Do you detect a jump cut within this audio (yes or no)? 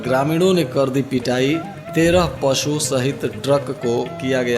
no